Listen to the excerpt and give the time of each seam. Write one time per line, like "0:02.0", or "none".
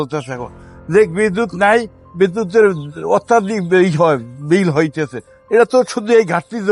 none

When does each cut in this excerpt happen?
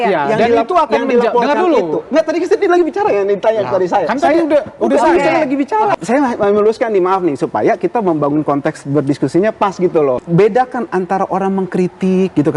0:06.0
0:10.2

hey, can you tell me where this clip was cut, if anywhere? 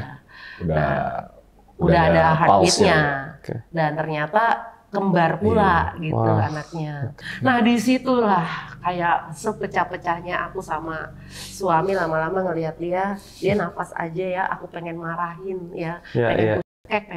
0:07.0

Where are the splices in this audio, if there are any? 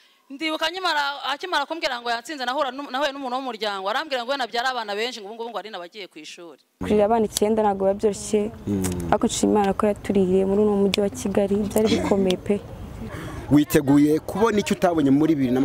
0:06.8
0:13.1

